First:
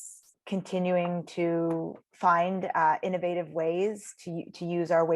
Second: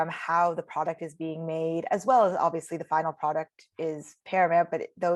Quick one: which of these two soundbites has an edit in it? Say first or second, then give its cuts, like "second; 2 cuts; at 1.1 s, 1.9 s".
first; 1 cut; at 2.0 s